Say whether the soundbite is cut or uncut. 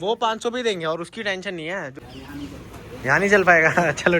cut